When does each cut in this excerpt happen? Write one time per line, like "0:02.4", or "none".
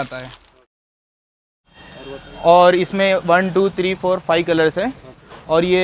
0:01.2